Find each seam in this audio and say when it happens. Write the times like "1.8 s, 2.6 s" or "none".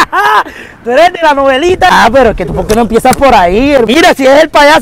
1.9 s, 3.9 s